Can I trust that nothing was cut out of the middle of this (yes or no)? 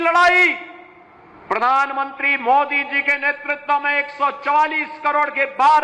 yes